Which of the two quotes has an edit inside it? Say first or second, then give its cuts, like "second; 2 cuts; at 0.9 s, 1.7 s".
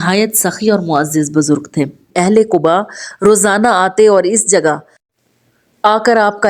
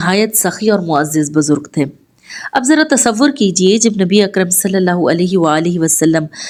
first; 1 cut; at 2.0 s